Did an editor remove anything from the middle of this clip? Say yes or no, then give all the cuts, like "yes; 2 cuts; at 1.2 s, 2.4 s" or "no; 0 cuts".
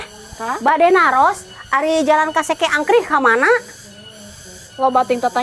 no; 0 cuts